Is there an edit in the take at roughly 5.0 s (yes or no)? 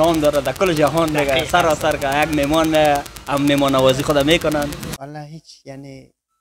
yes